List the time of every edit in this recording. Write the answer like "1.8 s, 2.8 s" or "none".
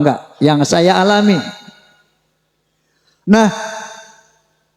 none

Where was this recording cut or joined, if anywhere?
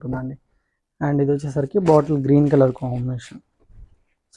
none

